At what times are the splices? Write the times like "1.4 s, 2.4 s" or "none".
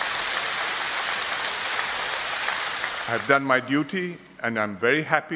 none

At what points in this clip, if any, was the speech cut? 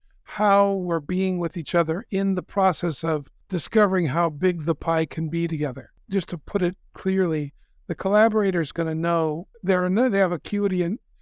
3.4 s, 5.7 s, 9.5 s

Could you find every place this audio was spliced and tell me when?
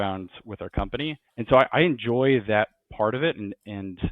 1.2 s

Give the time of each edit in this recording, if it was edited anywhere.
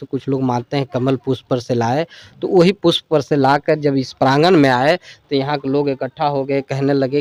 none

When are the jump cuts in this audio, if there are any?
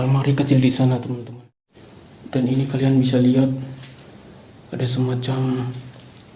1.2 s

